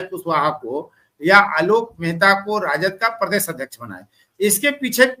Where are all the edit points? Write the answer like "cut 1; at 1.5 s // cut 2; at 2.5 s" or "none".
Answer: none